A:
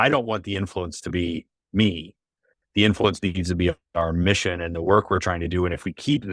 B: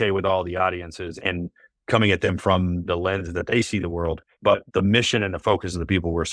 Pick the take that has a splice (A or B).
B